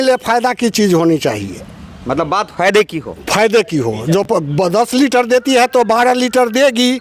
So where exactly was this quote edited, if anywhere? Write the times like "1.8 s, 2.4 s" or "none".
none